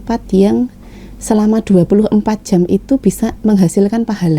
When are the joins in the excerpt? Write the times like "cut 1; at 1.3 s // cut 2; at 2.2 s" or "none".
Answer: none

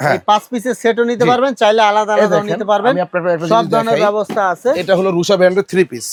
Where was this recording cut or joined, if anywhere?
none

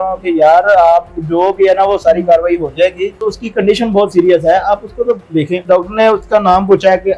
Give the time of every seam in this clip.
cut 1; at 3.3 s // cut 2; at 5.6 s

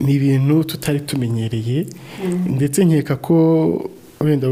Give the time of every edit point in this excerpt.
none

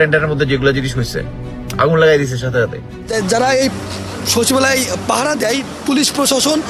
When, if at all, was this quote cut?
cut 1; at 3.1 s

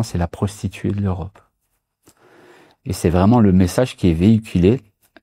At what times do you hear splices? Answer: none

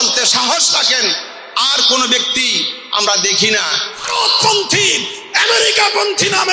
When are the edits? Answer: cut 1; at 3.9 s

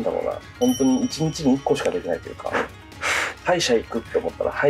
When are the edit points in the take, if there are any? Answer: cut 1; at 3.4 s

